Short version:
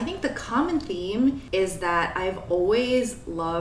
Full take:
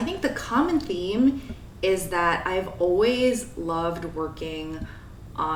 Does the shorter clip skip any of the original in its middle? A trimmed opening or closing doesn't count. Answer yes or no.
yes